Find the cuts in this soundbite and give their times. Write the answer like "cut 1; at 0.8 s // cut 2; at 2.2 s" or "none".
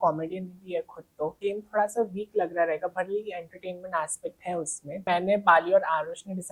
cut 1; at 1.4 s // cut 2; at 5.1 s